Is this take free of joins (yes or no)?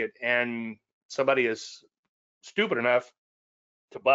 yes